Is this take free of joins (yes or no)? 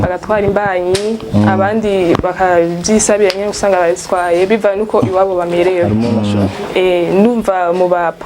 no